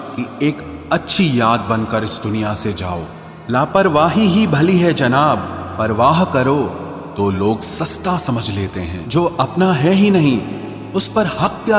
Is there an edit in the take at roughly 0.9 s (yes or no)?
no